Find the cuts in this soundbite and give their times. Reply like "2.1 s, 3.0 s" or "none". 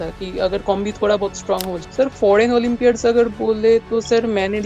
1.8 s